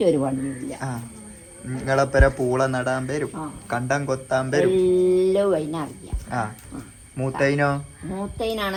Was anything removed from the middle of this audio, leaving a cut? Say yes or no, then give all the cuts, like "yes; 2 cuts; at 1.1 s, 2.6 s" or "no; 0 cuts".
no; 0 cuts